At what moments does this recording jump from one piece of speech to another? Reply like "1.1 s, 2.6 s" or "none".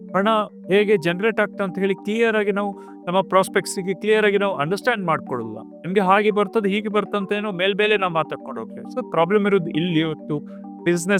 none